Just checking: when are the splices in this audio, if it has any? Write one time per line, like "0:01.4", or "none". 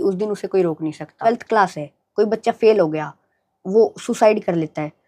0:01.3